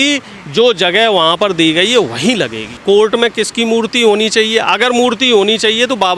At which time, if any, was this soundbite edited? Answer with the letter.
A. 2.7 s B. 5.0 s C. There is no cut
A